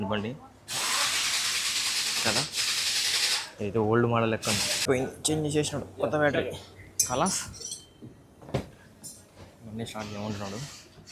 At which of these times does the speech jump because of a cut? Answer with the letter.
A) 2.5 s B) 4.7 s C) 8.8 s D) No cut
B